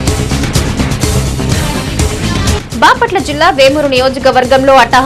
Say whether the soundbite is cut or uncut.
cut